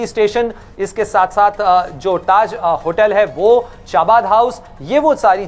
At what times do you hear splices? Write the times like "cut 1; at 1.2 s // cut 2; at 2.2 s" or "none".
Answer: none